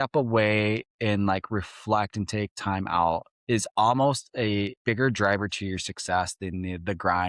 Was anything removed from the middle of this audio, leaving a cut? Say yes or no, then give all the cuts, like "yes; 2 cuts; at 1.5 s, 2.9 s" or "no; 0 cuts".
yes; 2 cuts; at 3.3 s, 4.7 s